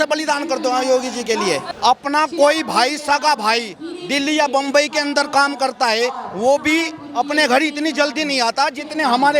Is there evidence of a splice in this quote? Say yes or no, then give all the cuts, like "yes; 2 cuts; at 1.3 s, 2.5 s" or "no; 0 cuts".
yes; 1 cut; at 1.7 s